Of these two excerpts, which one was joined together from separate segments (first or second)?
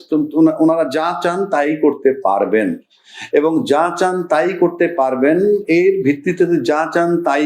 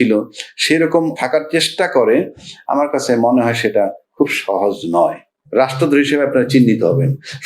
second